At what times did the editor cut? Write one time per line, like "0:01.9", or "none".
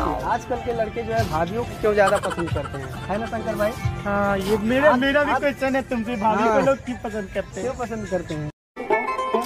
none